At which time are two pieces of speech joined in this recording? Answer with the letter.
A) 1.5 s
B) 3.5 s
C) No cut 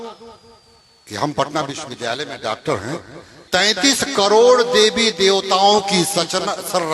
B